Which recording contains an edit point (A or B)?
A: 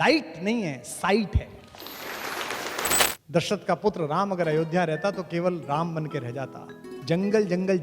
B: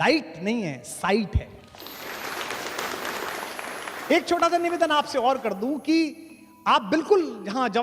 A